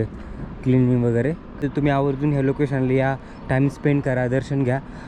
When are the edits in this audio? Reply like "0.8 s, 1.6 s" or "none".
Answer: 1.6 s

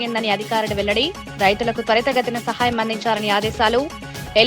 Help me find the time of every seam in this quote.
none

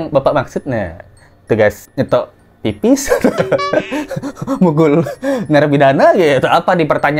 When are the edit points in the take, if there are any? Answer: none

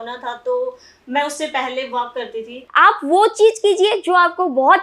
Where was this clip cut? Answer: 2.6 s

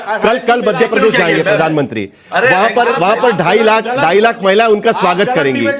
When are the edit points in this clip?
none

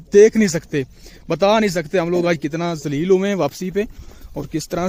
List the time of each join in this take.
none

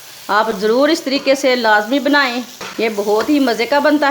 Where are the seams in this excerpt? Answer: 2.6 s

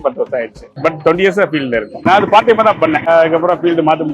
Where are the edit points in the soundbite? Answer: 2.0 s, 3.0 s

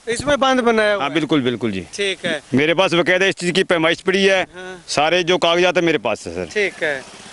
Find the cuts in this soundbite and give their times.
none

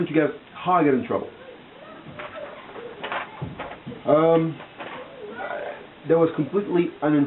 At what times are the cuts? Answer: 1.2 s

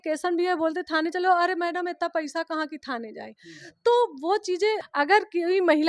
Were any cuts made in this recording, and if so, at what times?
4.9 s

